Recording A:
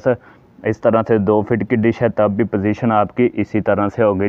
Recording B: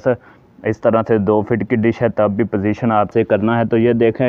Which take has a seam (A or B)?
B